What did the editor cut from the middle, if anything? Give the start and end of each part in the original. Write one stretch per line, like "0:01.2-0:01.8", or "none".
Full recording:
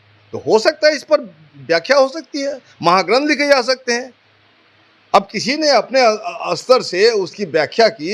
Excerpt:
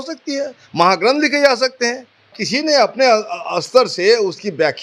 0:04.5-0:05.3